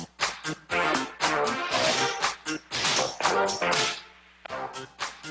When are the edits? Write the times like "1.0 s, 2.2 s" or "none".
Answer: 3.7 s